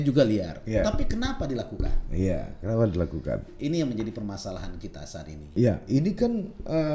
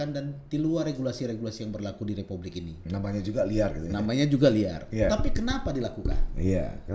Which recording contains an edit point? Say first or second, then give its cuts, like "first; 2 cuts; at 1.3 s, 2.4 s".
first; 1 cut; at 5.4 s